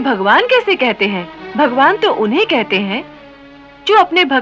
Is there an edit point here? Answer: yes; 1 cut; at 1.4 s

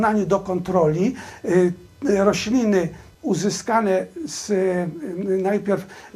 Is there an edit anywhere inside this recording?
yes; 1 cut; at 3.0 s

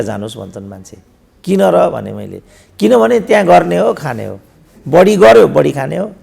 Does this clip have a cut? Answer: no; 0 cuts

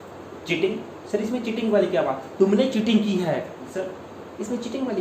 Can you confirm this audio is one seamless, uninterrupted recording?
no; 1 cut; at 3.6 s

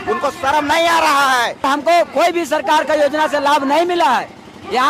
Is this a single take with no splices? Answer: no; 1 cut; at 1.6 s

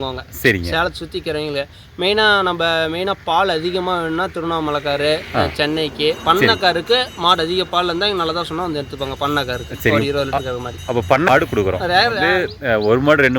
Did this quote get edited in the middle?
yes; 2 cuts; at 11.3 s, 12.3 s

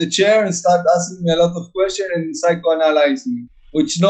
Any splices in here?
no; 0 cuts

